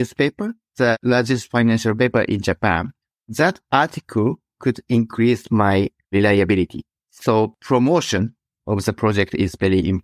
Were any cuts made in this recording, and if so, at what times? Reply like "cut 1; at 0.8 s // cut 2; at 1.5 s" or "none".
none